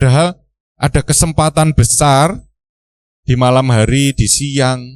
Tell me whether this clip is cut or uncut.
uncut